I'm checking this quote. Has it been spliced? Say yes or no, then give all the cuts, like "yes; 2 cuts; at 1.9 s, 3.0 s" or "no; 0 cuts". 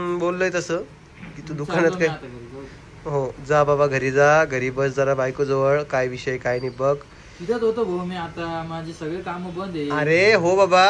no; 0 cuts